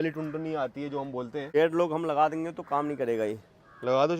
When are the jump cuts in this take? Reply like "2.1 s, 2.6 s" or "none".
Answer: 1.5 s

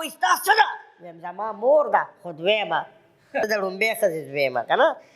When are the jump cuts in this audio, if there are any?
3.5 s

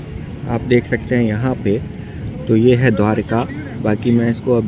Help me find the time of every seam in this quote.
none

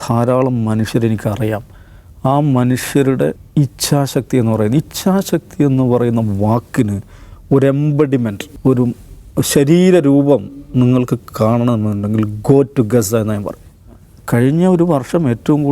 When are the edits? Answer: 3.4 s, 8.5 s, 14.1 s

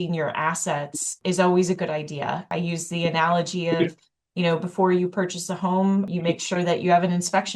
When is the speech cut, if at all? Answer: 1.1 s, 2.5 s, 6.1 s

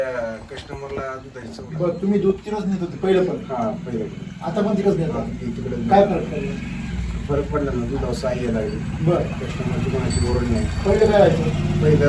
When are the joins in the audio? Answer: 1.6 s

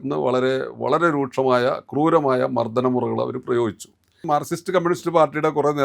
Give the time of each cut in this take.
4.2 s

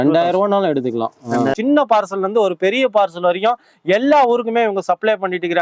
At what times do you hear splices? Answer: 1.6 s

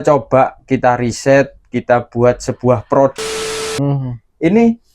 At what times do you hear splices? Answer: 3.8 s

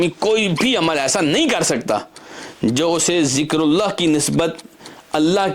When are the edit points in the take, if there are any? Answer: none

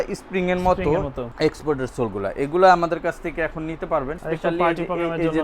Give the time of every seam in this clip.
1.2 s, 4.2 s

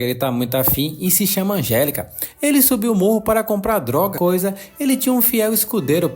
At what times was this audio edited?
4.1 s

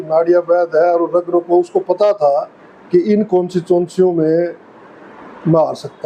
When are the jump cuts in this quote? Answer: none

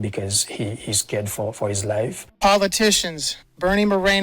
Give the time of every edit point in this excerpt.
2.2 s

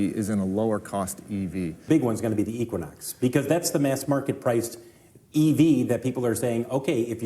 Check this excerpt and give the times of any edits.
1.9 s

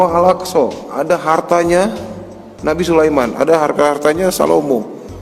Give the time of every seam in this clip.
none

